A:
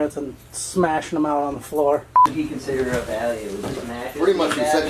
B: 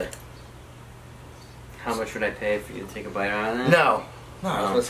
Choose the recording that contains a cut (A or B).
A